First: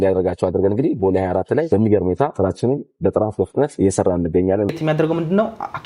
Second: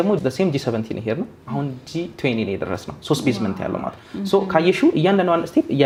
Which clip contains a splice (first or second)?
first